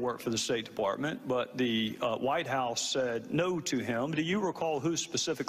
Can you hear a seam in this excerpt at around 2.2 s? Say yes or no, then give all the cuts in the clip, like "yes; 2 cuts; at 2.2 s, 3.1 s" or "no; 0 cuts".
yes; 1 cut; at 2.2 s